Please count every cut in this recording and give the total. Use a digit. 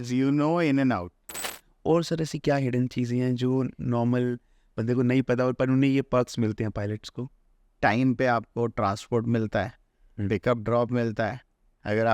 2